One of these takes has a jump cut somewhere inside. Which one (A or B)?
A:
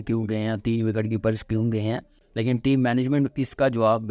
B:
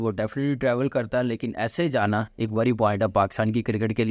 A